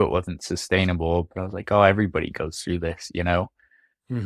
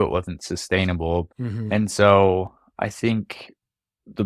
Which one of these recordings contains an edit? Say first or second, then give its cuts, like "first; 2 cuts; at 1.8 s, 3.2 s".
second; 1 cut; at 1.3 s